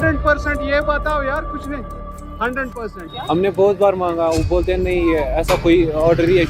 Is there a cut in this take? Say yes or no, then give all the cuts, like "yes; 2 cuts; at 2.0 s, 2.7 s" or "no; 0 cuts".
yes; 1 cut; at 3.2 s